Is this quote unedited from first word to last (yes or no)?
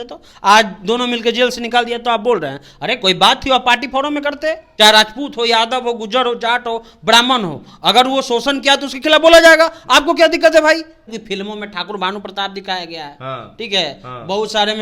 no